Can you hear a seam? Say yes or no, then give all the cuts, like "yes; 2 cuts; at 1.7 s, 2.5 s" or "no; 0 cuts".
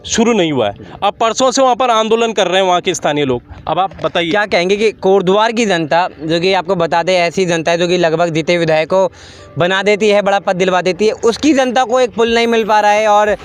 no; 0 cuts